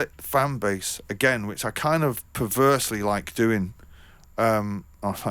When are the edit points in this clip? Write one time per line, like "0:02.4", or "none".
none